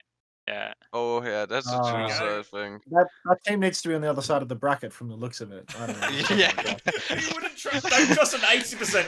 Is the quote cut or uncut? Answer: uncut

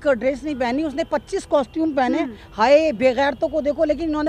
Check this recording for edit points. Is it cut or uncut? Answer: uncut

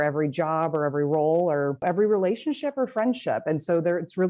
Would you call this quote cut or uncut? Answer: cut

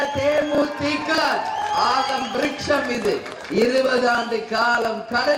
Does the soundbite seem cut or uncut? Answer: uncut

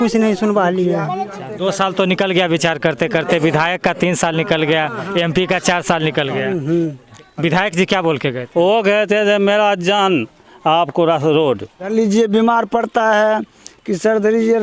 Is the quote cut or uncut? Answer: cut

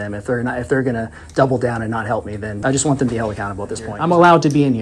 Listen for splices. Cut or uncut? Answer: cut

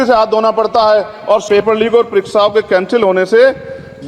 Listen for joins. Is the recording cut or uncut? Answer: cut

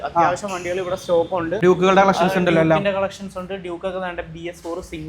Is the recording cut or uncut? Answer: cut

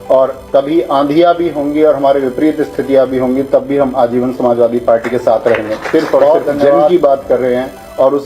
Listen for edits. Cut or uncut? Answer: cut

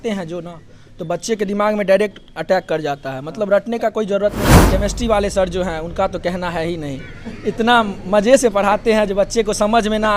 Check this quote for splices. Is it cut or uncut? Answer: cut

